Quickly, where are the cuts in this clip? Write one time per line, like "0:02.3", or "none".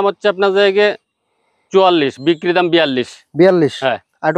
none